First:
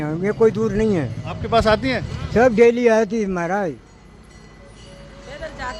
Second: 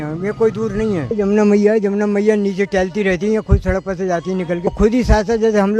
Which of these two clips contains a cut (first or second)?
second